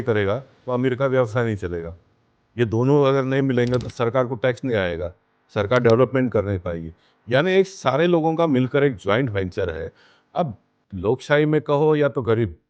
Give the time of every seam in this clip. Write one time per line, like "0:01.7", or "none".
none